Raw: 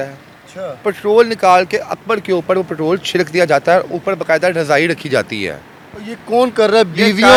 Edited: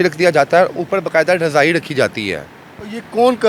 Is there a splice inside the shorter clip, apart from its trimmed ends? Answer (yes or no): no